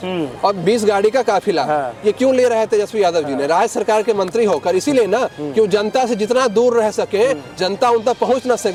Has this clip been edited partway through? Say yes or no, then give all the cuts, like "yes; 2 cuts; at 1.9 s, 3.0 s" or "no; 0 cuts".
no; 0 cuts